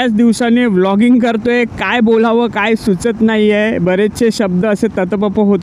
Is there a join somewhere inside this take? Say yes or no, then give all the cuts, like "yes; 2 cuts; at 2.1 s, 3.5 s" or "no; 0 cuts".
no; 0 cuts